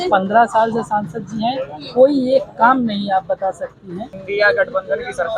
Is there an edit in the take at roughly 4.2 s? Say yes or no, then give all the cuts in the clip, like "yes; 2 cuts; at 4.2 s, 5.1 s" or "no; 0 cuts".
yes; 1 cut; at 4.2 s